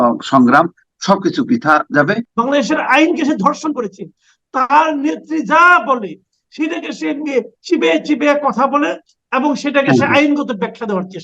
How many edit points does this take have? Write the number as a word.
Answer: one